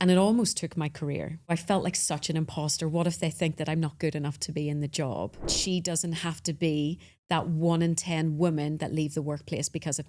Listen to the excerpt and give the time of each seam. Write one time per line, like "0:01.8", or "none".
0:01.5
0:05.6